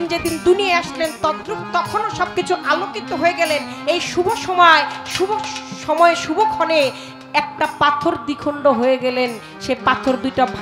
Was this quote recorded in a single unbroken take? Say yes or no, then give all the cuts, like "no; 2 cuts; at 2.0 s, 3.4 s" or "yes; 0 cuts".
yes; 0 cuts